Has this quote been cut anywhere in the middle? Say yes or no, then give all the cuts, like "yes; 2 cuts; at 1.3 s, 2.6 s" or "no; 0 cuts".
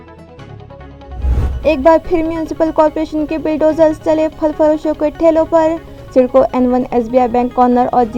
yes; 1 cut; at 1.4 s